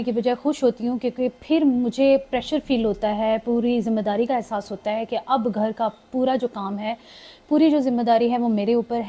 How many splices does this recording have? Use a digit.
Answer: 0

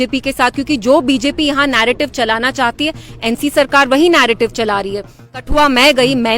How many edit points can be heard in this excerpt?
1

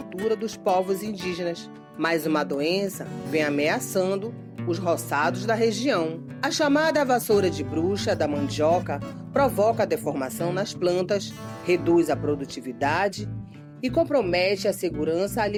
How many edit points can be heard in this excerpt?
0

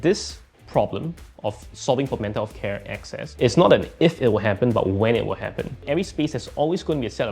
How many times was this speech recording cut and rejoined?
1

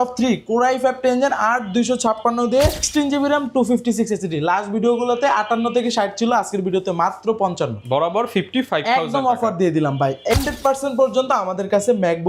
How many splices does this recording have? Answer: 2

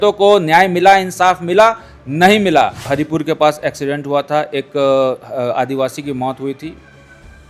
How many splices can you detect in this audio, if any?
1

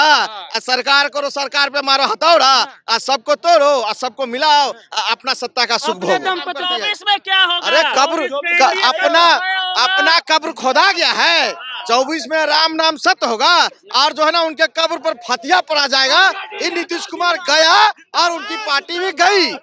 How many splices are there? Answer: 1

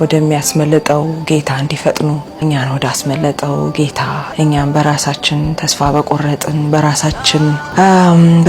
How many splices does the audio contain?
3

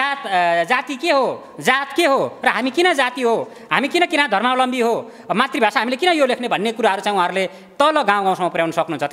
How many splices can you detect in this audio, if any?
0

